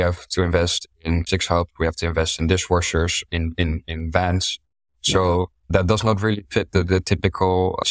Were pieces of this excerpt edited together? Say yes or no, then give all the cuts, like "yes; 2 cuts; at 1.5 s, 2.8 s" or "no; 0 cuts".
yes; 1 cut; at 1.3 s